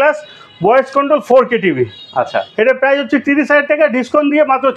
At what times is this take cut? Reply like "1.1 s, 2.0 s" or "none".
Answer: none